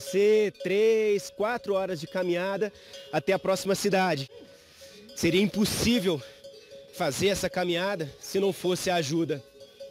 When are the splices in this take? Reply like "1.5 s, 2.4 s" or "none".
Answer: 4.3 s